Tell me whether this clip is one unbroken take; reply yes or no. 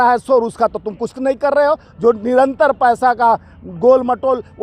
yes